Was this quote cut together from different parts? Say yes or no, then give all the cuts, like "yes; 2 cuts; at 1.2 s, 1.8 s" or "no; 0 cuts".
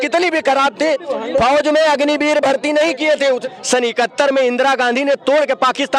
yes; 1 cut; at 3.4 s